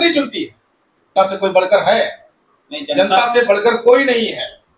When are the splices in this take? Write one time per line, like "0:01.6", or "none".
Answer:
0:01.1

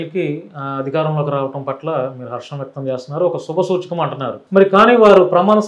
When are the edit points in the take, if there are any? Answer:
0:04.3

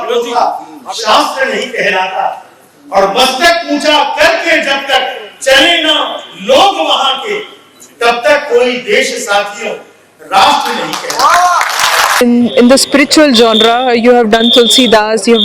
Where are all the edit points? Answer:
0:12.2

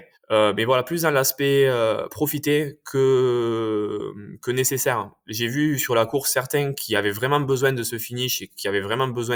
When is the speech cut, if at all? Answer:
none

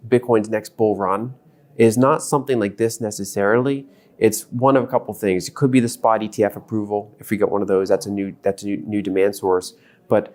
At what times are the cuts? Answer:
none

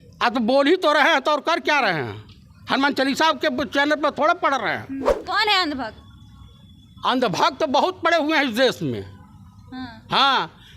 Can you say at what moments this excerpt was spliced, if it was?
0:05.2

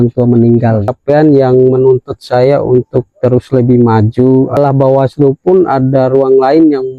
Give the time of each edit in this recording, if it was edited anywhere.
0:01.0
0:04.6

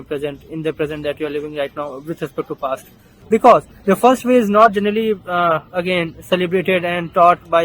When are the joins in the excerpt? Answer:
0:03.1

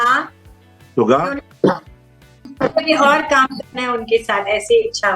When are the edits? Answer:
0:02.5

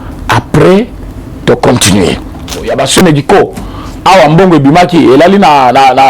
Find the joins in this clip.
0:02.7

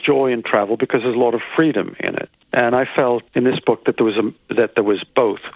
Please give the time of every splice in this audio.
0:02.3
0:03.3

